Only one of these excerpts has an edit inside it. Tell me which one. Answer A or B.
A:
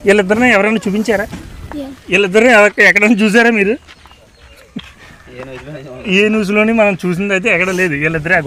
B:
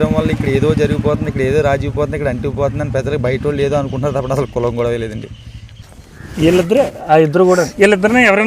B